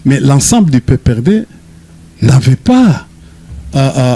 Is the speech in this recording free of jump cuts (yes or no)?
yes